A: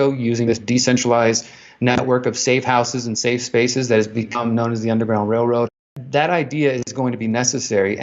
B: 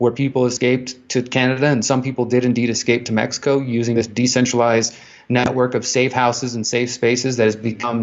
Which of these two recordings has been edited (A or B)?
A